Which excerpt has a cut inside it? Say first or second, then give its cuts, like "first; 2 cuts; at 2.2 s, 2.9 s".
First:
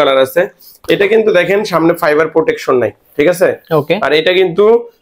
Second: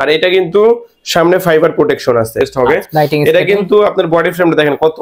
second; 1 cut; at 2.5 s